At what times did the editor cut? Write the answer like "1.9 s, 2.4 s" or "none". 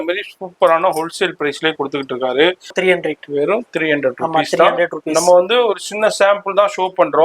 2.7 s